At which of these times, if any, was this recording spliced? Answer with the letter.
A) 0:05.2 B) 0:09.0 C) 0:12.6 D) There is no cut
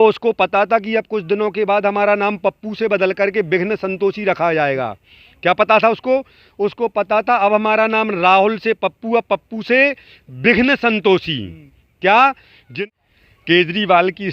C